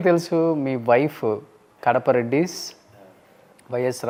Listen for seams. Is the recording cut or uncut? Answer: uncut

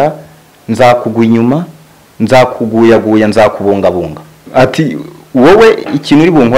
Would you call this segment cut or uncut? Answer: cut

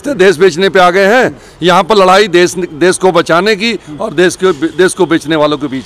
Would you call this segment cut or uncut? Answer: uncut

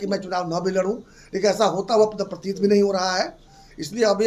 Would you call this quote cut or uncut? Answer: uncut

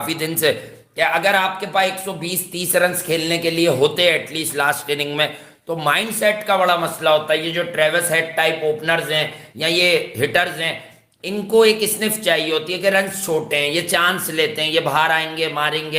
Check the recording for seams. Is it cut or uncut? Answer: uncut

